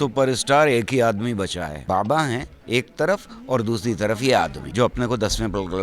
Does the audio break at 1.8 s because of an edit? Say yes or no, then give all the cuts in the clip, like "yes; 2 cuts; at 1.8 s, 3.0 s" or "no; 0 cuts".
yes; 3 cuts; at 1.8 s, 2.5 s, 4.6 s